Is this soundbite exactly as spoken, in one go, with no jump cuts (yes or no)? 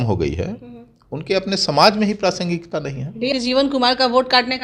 no